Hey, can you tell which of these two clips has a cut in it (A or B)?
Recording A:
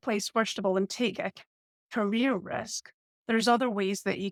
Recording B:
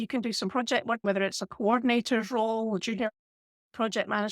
B